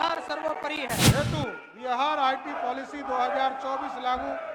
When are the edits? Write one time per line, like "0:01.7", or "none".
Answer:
0:01.1